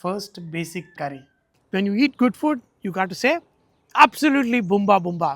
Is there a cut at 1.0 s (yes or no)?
yes